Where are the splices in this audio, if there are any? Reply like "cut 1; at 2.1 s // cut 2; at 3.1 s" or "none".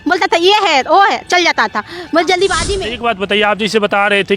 cut 1; at 2.7 s